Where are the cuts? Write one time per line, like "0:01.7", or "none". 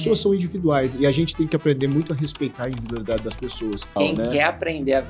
0:04.0